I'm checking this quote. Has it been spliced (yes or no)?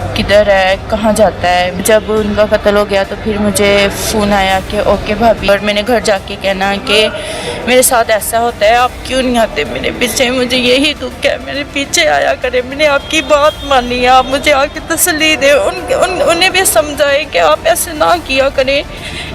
yes